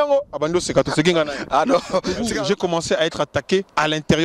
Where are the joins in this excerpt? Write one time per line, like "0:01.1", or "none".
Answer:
0:02.3